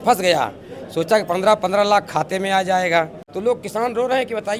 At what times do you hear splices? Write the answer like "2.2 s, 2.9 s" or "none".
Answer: 3.2 s